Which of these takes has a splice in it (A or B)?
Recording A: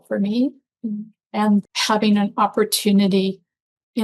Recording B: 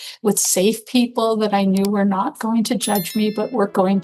A